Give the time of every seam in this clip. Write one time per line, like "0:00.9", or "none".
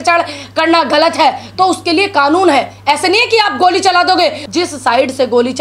0:04.4

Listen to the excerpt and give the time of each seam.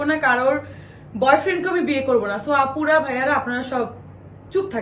none

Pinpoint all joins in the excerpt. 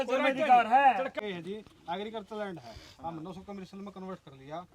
0:01.2

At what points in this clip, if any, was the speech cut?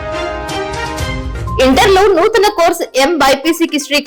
0:01.6

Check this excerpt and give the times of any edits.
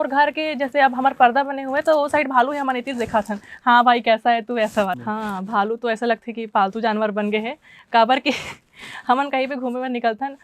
0:04.9

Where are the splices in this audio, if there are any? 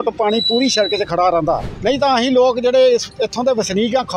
0:01.7

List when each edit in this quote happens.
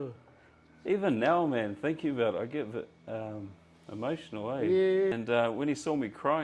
0:05.1

